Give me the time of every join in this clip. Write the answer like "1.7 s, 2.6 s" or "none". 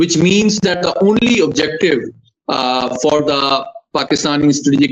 none